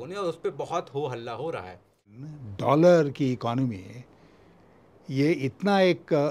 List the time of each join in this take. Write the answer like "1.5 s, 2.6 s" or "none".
2.1 s